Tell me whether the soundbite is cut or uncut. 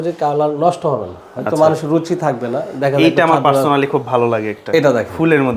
uncut